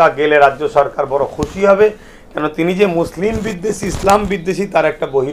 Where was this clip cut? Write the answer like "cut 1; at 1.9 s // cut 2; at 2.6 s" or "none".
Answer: none